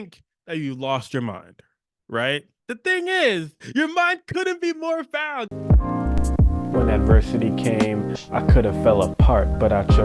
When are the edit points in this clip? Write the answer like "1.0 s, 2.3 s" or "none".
5.5 s